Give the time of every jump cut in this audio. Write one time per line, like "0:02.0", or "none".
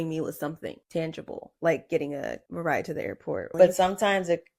0:00.8
0:01.5
0:02.4
0:03.5